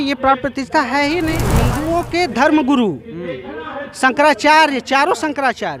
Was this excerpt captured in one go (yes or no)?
no